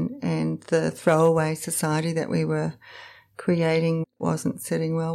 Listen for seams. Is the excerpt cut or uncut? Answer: cut